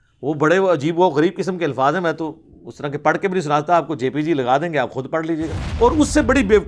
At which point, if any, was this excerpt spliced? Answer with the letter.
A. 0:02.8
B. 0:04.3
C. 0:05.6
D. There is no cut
C